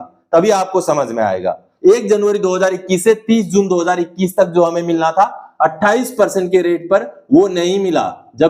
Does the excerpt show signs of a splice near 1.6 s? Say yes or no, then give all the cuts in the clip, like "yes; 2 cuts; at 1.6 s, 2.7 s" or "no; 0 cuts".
yes; 1 cut; at 1.6 s